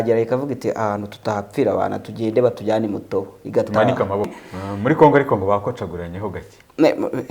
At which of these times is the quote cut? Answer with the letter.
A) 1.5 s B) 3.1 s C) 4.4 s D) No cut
C